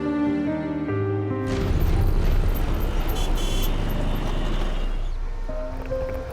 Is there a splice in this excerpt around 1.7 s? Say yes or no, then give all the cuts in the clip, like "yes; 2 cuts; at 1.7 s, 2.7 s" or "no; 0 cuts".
yes; 1 cut; at 1.7 s